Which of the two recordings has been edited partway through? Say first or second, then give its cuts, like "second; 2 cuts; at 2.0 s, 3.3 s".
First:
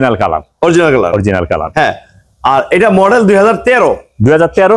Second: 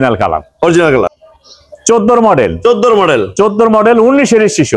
second; 1 cut; at 1.1 s